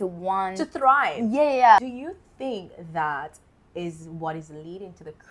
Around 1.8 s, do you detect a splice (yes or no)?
yes